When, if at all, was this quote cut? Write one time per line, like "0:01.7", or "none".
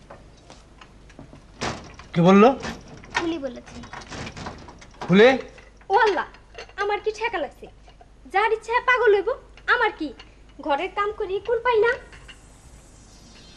none